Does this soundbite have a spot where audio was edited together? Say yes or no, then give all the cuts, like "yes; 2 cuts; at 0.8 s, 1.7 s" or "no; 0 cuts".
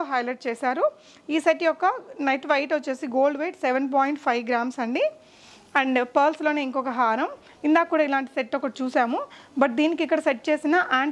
no; 0 cuts